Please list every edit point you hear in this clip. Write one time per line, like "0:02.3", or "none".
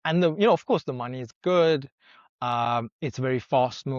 none